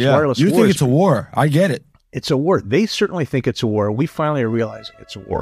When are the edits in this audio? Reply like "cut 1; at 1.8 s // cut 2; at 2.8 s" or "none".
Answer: none